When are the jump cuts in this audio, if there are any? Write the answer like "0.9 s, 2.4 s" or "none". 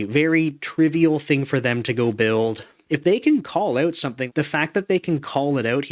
2.7 s, 4.3 s